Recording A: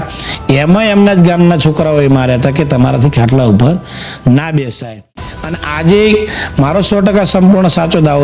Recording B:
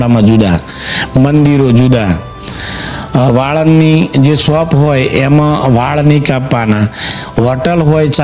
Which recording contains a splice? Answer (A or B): A